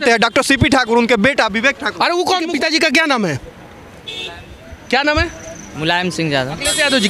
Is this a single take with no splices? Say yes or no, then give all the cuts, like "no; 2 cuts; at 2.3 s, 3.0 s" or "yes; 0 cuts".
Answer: no; 1 cut; at 2.5 s